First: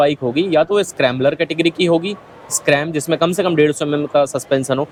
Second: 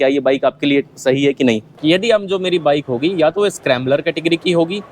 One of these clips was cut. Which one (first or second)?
second